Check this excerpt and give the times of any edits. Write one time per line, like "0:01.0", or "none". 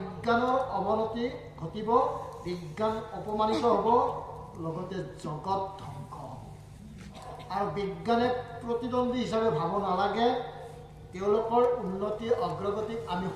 0:07.3